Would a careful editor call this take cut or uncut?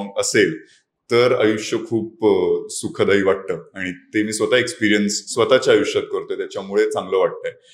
uncut